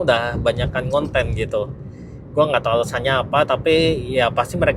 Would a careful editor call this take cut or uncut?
uncut